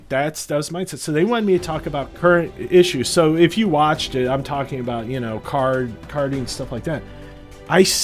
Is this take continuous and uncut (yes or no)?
no